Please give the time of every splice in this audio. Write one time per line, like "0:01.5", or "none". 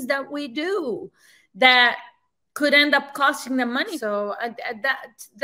0:03.9